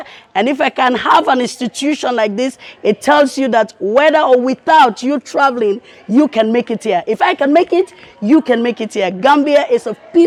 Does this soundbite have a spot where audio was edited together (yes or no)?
no